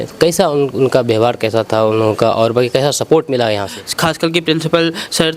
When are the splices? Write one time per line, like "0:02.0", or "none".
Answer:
0:03.7